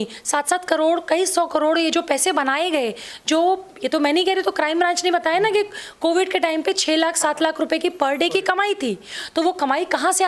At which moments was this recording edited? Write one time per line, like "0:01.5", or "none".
none